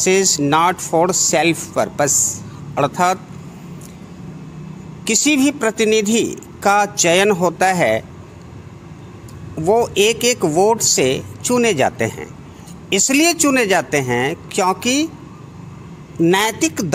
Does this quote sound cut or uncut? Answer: uncut